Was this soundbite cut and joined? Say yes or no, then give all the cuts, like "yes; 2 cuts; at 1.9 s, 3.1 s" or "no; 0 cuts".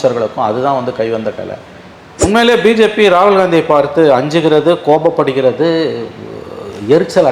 yes; 1 cut; at 2.2 s